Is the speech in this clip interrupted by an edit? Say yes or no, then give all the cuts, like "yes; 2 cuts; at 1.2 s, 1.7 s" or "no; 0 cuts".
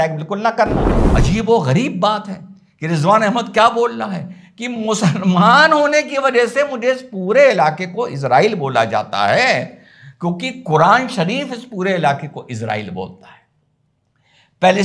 yes; 1 cut; at 1.0 s